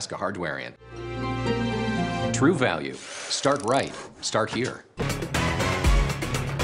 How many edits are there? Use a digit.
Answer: 1